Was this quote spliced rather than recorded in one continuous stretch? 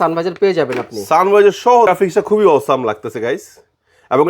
yes; 1 cut; at 1.9 s

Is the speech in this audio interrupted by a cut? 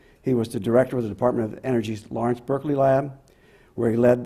no; 0 cuts

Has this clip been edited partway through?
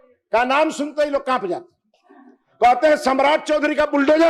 no; 0 cuts

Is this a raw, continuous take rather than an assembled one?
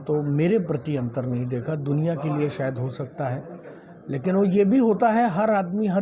yes; 0 cuts

